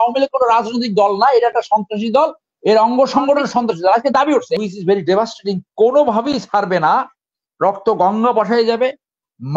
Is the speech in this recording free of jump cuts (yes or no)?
no